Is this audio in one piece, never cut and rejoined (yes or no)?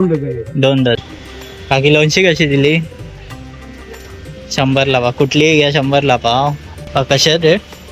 no